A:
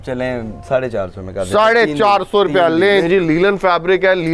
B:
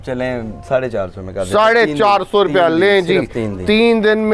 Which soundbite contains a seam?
A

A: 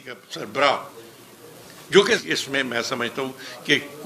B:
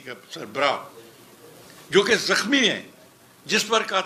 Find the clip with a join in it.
A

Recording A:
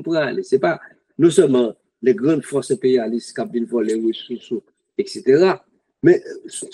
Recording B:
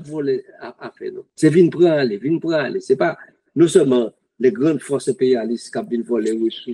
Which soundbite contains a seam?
B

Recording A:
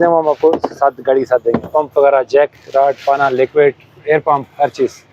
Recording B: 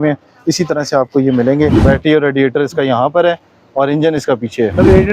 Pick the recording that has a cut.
B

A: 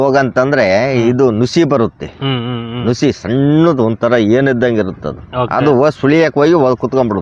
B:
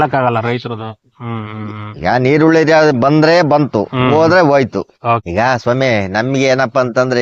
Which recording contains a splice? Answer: B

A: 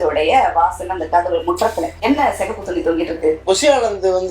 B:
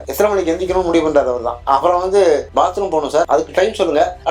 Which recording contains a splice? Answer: A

